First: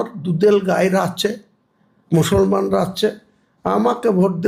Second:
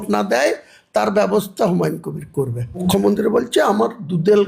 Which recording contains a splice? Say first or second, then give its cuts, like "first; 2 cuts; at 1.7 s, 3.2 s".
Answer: second; 1 cut; at 2.8 s